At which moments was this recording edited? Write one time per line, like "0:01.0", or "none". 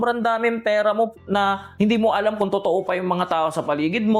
none